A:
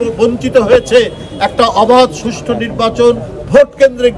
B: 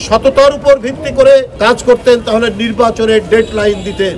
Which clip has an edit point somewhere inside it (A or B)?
B